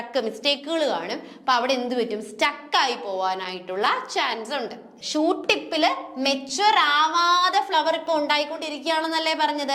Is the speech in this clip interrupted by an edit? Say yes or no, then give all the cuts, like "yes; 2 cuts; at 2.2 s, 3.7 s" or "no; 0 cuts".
yes; 1 cut; at 5.1 s